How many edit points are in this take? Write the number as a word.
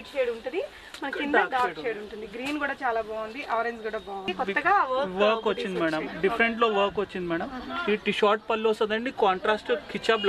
one